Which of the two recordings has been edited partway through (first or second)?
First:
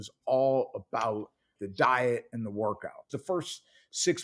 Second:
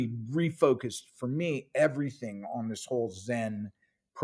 first